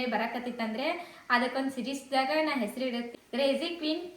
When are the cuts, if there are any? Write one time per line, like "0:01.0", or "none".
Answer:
0:03.2